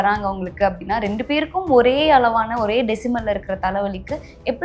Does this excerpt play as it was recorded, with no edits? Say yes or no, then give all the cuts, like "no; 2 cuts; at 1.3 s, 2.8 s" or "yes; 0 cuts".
yes; 0 cuts